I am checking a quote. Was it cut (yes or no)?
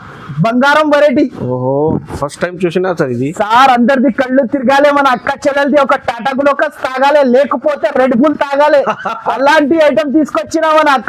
no